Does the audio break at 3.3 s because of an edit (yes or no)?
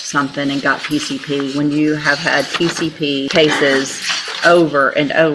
yes